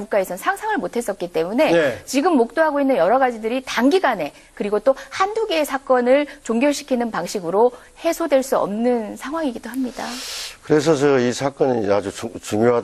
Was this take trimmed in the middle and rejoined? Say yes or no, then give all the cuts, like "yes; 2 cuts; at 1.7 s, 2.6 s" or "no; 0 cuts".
no; 0 cuts